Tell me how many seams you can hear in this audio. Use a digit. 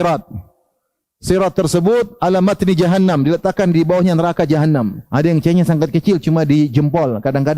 1